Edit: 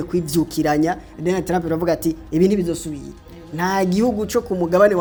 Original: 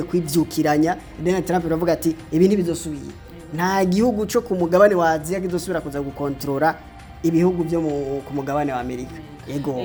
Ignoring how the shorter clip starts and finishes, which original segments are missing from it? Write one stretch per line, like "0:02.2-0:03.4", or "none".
none